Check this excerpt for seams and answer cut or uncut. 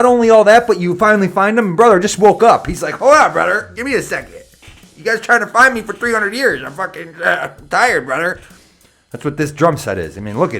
uncut